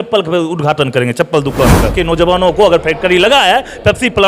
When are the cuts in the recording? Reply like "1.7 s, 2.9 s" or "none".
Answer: 1.9 s